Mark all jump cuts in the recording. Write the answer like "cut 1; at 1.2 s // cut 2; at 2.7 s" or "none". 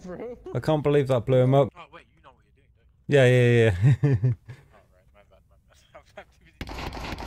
cut 1; at 1.8 s